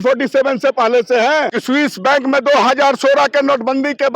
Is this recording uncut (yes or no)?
no